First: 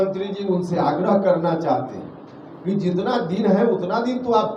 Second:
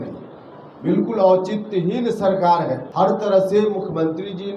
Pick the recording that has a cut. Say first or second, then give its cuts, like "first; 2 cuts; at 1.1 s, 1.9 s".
second; 1 cut; at 2.9 s